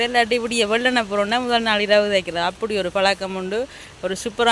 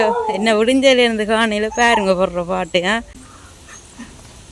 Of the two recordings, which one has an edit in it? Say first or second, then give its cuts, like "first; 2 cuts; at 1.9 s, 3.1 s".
second; 1 cut; at 2.8 s